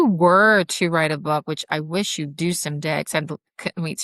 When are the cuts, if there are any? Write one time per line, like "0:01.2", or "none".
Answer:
none